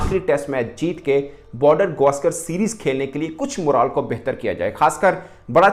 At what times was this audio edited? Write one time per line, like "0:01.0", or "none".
none